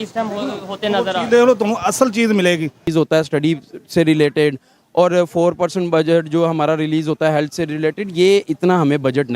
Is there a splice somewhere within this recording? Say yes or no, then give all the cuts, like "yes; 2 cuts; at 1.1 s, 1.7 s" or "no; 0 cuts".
yes; 1 cut; at 2.9 s